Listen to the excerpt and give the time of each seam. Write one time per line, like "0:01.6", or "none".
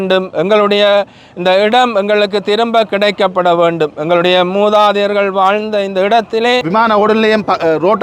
0:06.7